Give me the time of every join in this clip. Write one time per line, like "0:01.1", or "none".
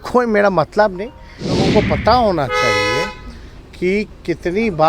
0:01.6